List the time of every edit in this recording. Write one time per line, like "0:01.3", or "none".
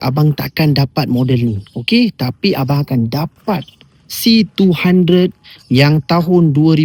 none